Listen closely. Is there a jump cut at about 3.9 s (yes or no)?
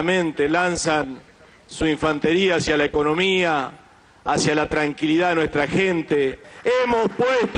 no